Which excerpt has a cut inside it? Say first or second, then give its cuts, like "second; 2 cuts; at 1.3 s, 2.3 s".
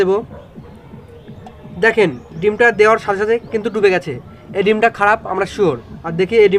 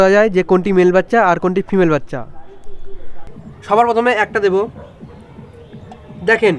second; 1 cut; at 3.1 s